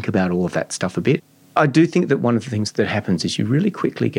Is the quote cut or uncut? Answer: cut